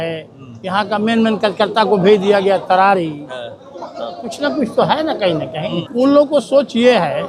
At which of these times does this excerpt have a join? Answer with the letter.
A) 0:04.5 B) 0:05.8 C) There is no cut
B